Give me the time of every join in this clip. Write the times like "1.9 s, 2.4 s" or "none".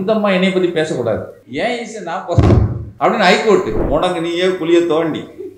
1.4 s, 2.8 s, 3.8 s